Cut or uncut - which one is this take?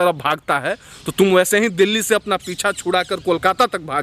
uncut